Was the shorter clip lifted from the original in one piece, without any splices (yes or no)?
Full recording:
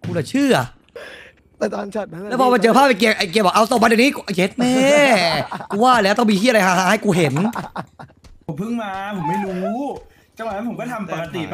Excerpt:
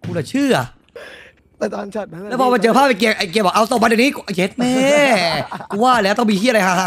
yes